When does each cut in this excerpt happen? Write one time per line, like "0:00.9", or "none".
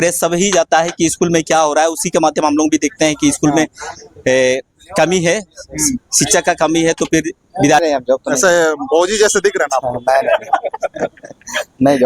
0:07.8